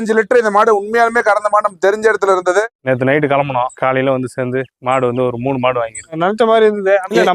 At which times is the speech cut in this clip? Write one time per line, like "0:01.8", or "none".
0:02.6